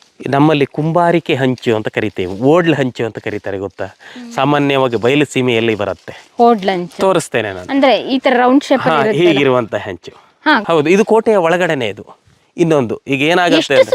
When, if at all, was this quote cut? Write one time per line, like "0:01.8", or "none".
0:10.6